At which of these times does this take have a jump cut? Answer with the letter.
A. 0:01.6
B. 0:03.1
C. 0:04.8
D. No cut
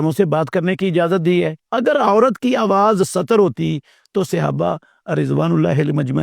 A